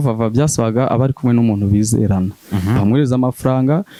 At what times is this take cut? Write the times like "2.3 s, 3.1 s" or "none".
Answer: none